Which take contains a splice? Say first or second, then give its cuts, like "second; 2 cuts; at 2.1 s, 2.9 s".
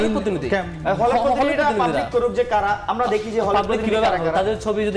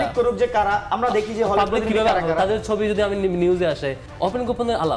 second; 1 cut; at 4.0 s